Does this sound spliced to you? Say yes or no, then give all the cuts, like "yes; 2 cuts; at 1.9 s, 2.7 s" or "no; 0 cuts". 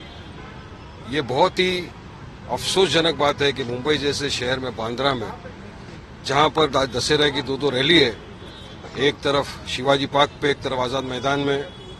no; 0 cuts